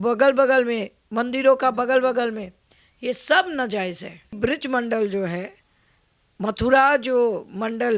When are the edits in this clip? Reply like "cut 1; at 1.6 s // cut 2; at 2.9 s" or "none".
cut 1; at 4.3 s